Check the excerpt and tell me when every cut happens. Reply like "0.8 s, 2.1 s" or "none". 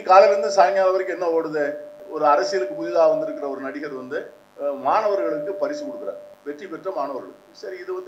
2.0 s, 4.4 s, 6.3 s